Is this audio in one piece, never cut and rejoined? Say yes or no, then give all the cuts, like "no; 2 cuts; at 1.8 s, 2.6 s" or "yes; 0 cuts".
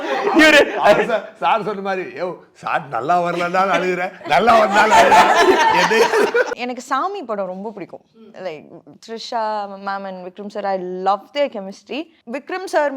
no; 2 cuts; at 6.5 s, 12.2 s